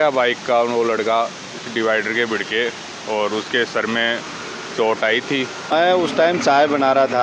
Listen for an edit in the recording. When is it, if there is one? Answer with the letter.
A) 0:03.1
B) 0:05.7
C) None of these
B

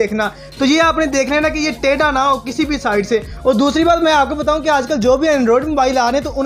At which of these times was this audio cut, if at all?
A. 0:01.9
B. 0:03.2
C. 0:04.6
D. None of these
D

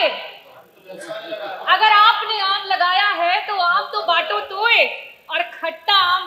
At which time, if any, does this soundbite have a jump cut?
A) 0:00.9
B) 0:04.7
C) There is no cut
C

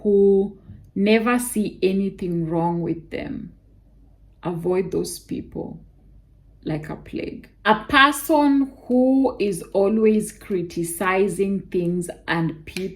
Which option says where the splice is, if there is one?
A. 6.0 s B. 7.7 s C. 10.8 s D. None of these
B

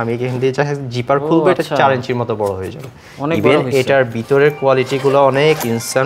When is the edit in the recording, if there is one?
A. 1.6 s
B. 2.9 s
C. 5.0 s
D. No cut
D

